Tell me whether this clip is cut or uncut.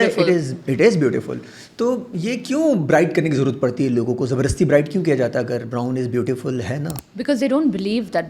cut